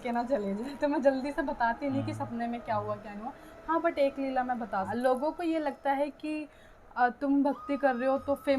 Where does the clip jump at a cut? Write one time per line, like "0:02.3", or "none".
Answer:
0:04.9

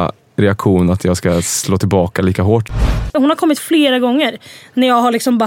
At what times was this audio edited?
0:03.0

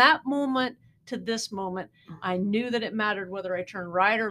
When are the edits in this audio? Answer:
none

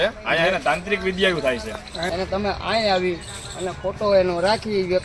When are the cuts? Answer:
0:02.0

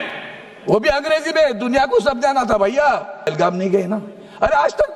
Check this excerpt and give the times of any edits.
0:03.3

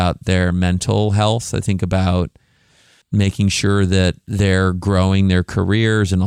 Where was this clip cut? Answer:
none

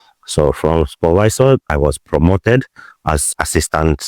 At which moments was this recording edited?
0:01.7
0:03.2

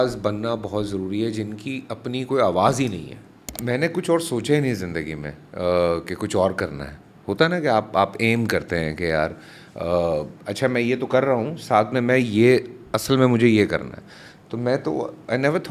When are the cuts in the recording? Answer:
0:03.5

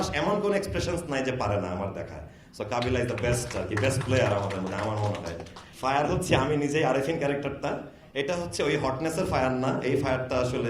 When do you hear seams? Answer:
none

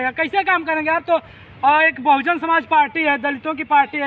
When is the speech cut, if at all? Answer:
none

